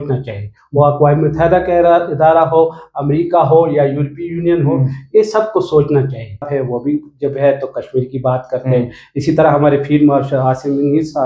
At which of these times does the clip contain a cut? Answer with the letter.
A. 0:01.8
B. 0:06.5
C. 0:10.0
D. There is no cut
B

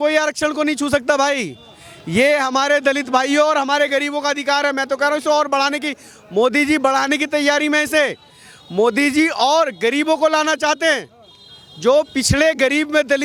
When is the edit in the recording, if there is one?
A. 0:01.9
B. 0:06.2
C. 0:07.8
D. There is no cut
D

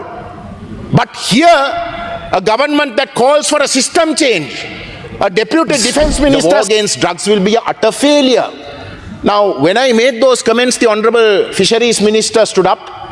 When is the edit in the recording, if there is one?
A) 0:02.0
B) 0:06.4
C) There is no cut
B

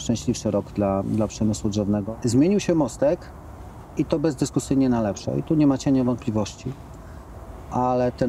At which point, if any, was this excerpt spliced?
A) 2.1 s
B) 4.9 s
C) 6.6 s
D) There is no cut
A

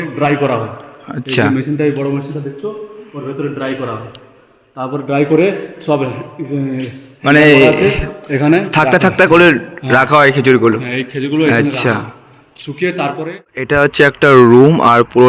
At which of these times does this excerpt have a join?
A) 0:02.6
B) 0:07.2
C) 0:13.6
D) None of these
C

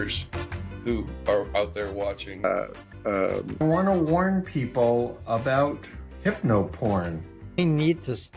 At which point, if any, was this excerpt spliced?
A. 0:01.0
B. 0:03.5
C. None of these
B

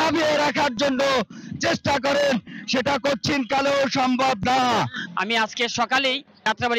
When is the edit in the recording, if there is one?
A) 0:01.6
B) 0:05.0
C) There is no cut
B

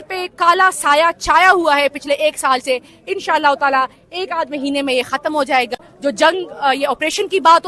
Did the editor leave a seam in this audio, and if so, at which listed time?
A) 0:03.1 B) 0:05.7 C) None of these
B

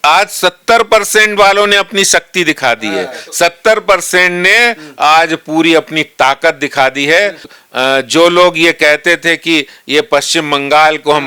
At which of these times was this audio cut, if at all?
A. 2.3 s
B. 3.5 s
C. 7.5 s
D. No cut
C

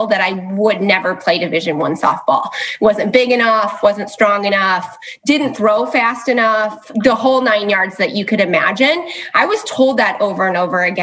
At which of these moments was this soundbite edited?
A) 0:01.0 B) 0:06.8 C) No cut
B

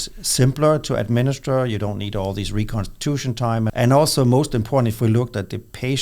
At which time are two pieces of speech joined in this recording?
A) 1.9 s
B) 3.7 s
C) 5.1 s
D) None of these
B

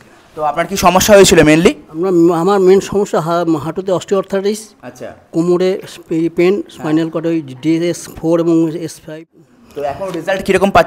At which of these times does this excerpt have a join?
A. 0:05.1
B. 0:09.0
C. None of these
B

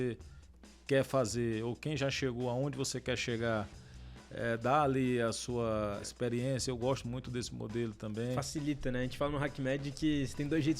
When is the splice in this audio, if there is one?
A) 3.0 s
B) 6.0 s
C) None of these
B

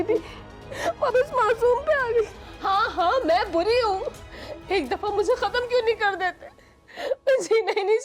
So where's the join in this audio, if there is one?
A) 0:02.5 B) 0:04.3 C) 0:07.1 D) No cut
A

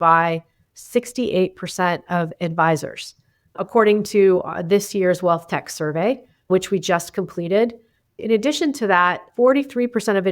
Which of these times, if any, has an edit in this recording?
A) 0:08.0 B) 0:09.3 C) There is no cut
C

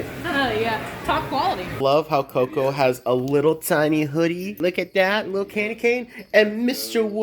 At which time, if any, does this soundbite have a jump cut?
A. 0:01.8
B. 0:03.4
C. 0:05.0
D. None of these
A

